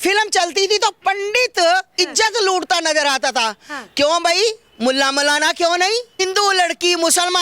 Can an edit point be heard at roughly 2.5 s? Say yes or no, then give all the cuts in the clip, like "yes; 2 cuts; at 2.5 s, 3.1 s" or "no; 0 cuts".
no; 1 cut; at 6.2 s